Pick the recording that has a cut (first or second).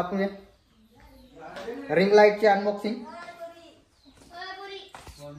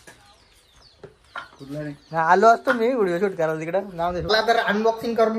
second